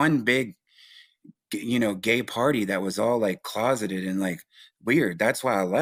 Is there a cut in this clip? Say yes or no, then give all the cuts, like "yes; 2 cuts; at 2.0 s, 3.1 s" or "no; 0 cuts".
no; 0 cuts